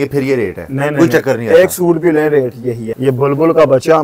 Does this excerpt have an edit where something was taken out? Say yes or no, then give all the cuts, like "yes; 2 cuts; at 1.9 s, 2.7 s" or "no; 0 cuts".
yes; 1 cut; at 2.9 s